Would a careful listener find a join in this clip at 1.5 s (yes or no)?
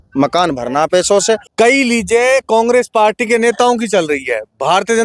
yes